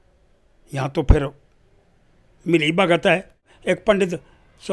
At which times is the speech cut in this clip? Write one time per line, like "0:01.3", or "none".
0:03.5